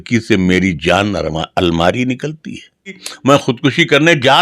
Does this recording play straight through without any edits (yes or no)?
no